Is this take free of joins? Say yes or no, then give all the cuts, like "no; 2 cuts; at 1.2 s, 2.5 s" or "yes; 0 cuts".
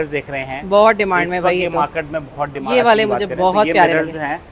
no; 1 cut; at 2.6 s